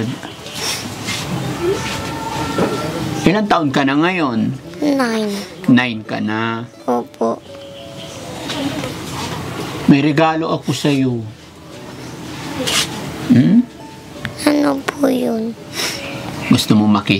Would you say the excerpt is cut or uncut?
uncut